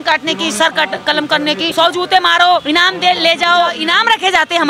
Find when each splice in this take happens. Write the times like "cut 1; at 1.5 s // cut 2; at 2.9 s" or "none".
cut 1; at 1.7 s // cut 2; at 2.6 s // cut 3; at 3.8 s